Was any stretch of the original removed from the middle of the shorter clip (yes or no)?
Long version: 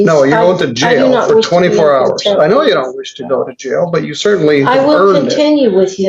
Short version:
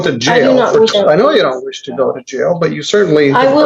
yes